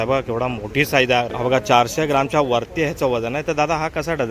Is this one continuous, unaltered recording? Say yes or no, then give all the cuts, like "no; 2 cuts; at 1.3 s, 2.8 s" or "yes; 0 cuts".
no; 1 cut; at 1.3 s